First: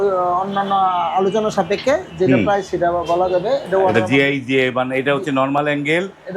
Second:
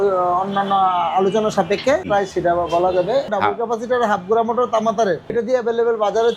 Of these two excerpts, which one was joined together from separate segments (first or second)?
second